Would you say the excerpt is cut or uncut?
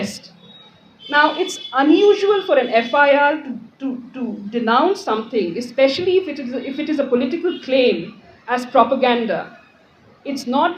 uncut